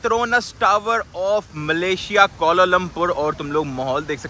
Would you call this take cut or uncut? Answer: uncut